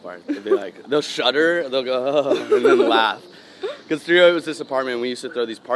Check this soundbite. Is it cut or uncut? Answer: uncut